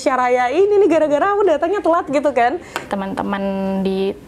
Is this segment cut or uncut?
cut